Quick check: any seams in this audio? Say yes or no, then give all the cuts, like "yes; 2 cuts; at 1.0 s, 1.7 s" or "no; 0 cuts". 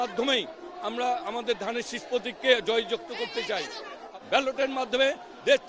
yes; 1 cut; at 4.1 s